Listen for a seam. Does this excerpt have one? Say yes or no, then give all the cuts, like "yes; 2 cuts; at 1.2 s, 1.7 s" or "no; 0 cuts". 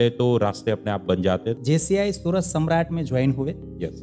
yes; 1 cut; at 1.6 s